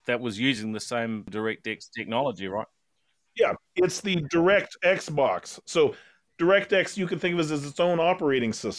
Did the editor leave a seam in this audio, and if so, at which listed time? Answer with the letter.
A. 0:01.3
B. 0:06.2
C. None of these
A